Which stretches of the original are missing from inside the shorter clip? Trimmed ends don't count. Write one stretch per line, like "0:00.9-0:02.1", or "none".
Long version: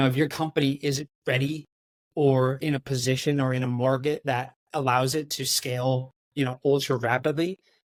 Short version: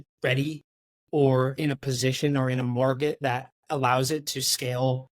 none